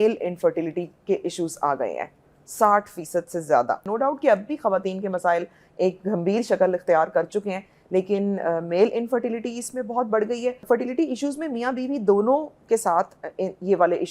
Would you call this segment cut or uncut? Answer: cut